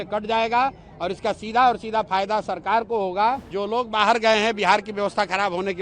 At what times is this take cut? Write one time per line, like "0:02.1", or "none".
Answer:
0:03.5